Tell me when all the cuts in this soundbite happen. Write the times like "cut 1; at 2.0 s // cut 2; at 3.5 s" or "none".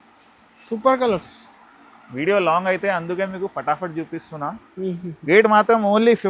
none